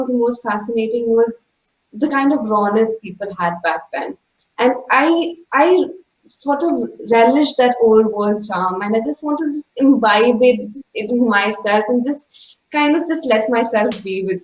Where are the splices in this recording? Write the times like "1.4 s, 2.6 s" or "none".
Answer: none